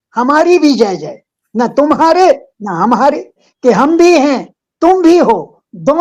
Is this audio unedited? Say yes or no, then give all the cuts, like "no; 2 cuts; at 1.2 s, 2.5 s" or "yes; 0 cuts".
no; 1 cut; at 3.5 s